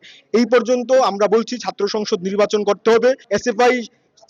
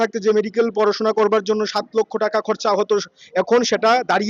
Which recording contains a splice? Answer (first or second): first